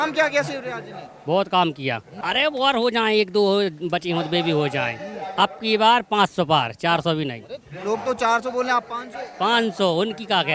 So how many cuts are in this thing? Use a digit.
1